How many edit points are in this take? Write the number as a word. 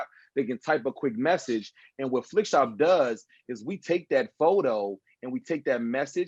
zero